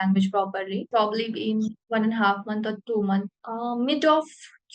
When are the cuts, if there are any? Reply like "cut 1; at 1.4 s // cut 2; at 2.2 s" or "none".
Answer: cut 1; at 0.9 s // cut 2; at 1.8 s // cut 3; at 3.4 s